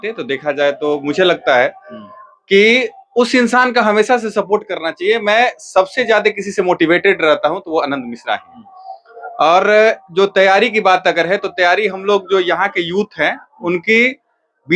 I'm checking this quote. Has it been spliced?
no; 0 cuts

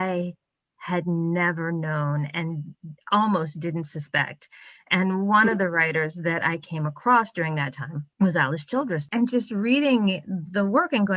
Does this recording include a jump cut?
yes; 1 cut; at 9.0 s

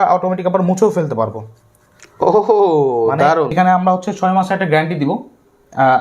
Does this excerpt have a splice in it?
yes; 1 cut; at 3.5 s

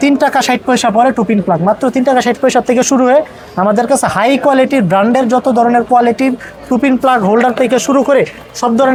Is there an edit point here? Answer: no; 0 cuts

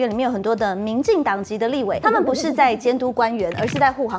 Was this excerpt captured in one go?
no; 1 cut; at 2.0 s

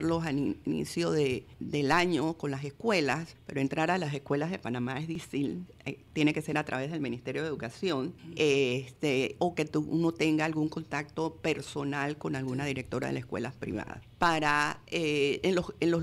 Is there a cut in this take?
yes; 5 cuts; at 1.5 s, 3.4 s, 5.3 s, 8.2 s, 14.0 s

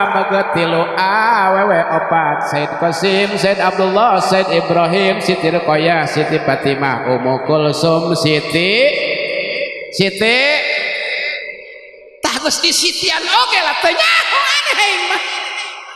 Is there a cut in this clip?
no; 0 cuts

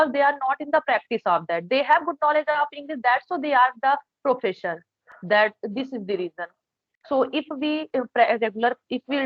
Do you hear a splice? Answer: no; 0 cuts

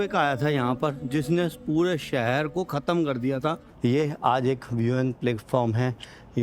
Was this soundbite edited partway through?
yes; 1 cut; at 3.7 s

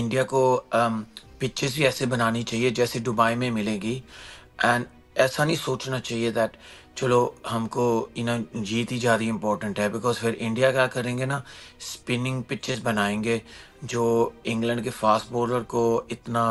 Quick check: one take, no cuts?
yes; 0 cuts

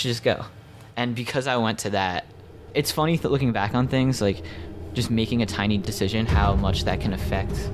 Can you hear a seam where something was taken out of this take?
no; 0 cuts

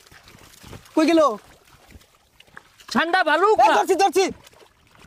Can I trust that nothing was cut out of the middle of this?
yes; 0 cuts

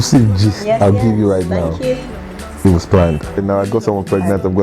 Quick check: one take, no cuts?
no; 1 cut; at 3.4 s

